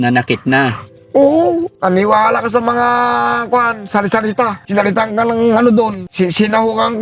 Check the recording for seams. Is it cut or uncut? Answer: cut